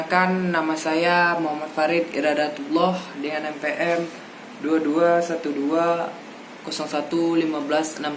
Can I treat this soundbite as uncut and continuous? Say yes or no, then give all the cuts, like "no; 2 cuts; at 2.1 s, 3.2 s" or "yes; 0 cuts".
yes; 0 cuts